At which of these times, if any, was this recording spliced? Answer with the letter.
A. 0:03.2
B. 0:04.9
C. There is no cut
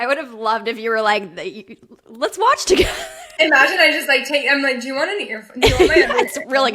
A